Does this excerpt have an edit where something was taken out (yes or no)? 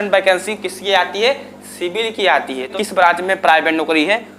yes